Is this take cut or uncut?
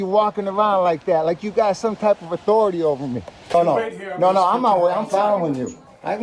cut